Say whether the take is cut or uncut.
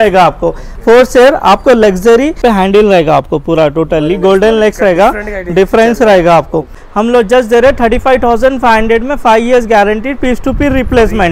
cut